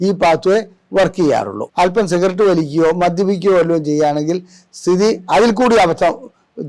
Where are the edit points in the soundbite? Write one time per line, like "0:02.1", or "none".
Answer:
0:01.6